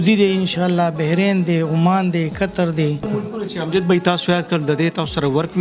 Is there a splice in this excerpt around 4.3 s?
no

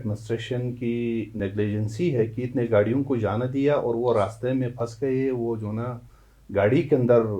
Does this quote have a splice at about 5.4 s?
no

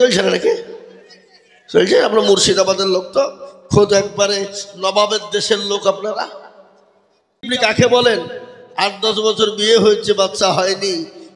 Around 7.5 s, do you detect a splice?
yes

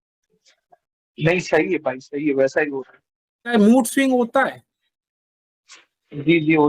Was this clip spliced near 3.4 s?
yes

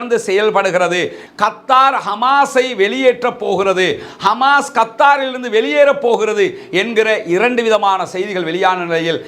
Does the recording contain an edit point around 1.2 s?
yes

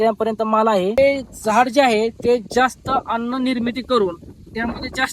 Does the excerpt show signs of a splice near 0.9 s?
yes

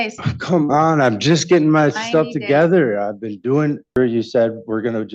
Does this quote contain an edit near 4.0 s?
yes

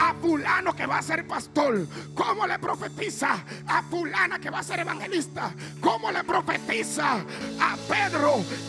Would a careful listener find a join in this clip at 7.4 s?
yes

